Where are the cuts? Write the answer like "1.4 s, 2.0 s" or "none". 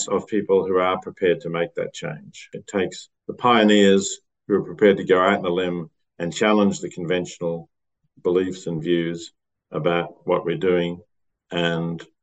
2.7 s